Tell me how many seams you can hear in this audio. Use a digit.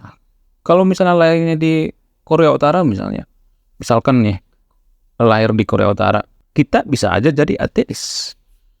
1